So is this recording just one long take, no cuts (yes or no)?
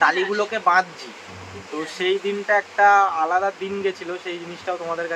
yes